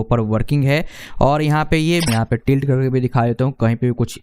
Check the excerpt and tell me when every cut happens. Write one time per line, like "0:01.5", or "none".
0:02.1